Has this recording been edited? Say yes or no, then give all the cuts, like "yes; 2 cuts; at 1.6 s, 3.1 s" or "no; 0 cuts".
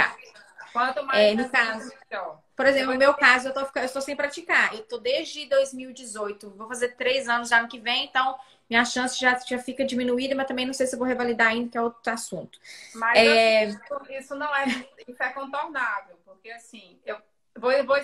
yes; 1 cut; at 14.5 s